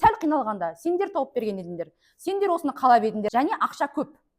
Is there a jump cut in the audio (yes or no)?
yes